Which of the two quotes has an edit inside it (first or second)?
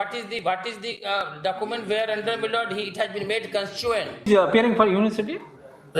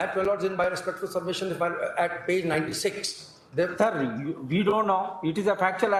first